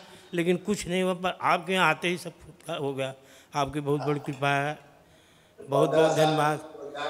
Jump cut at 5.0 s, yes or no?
no